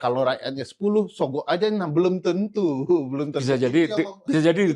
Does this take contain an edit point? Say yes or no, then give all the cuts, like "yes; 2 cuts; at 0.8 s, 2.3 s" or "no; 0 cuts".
no; 0 cuts